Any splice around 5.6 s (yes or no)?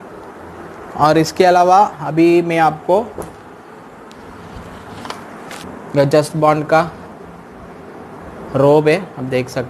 yes